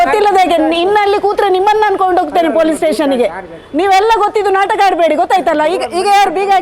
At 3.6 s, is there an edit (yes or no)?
no